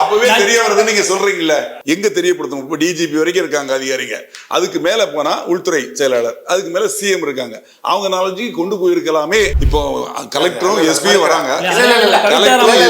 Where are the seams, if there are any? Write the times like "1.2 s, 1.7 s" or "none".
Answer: 1.7 s, 9.6 s